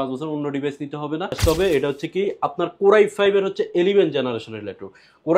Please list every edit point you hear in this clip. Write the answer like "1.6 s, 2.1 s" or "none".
1.4 s